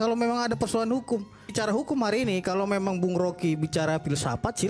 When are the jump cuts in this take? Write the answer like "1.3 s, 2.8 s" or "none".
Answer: 1.5 s

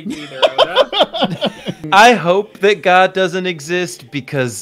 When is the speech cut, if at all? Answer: 1.8 s

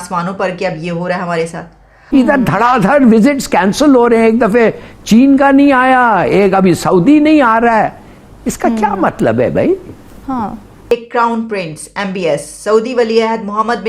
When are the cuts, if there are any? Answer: 2.0 s, 10.8 s

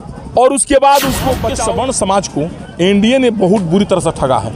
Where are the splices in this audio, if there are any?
1.5 s

